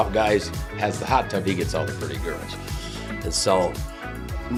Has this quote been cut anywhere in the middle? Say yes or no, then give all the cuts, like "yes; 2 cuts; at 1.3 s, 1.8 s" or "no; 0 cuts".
no; 0 cuts